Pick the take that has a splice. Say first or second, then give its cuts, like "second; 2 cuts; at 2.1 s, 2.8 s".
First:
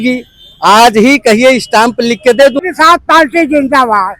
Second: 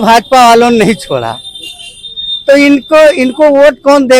first; 1 cut; at 2.6 s